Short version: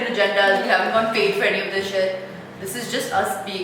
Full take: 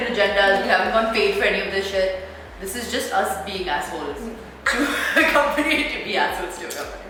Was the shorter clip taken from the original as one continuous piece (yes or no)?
yes